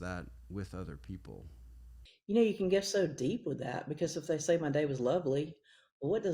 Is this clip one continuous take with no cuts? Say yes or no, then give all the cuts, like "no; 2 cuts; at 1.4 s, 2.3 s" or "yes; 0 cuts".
yes; 0 cuts